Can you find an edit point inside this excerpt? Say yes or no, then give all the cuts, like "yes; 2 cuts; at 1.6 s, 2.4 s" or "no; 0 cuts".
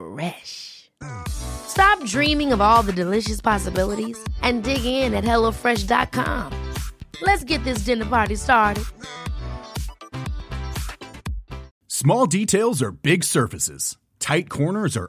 yes; 1 cut; at 11.8 s